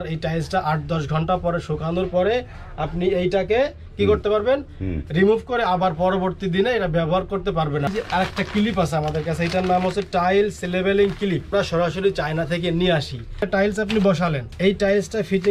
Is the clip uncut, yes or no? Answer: no